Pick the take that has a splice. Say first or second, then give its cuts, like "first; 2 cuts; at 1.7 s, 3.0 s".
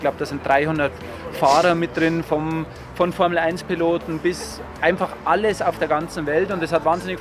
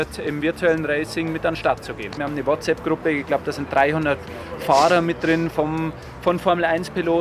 second; 1 cut; at 2.1 s